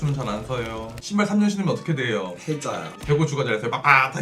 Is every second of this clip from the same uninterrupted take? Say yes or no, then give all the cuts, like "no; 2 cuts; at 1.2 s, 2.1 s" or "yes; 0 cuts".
no; 1 cut; at 3.0 s